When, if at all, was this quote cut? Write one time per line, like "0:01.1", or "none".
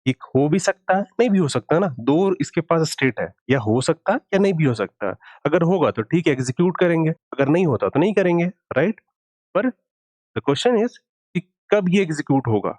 0:07.2